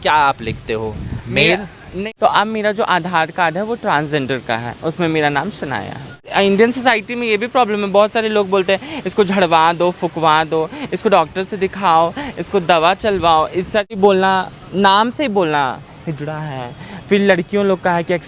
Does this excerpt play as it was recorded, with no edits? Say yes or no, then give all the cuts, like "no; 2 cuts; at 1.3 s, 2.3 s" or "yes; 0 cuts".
no; 3 cuts; at 2.0 s, 6.3 s, 14.0 s